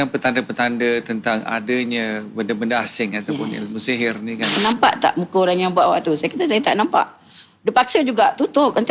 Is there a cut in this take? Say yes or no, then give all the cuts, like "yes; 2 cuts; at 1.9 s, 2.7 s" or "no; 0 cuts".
yes; 1 cut; at 4.6 s